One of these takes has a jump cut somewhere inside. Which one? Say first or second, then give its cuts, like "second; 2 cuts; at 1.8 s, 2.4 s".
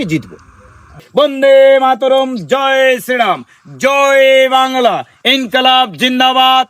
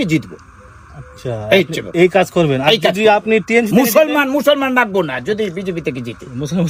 first; 1 cut; at 1.0 s